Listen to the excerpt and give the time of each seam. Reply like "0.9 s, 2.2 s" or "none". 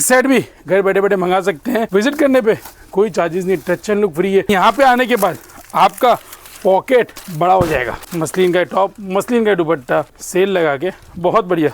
1.9 s, 4.5 s, 8.1 s, 10.2 s